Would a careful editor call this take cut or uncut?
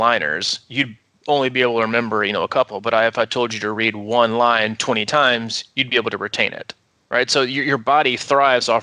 uncut